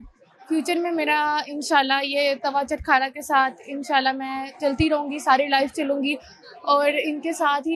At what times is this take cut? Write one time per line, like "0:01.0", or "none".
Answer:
none

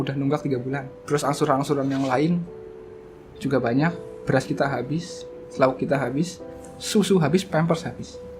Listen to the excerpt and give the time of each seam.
0:00.9

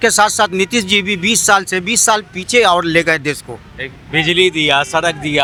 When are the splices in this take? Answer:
none

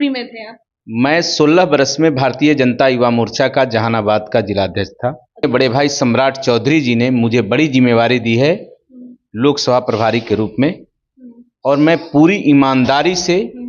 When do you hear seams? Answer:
0:05.4

